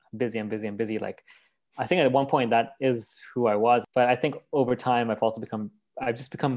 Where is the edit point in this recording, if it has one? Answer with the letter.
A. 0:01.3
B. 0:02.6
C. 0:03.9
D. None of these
C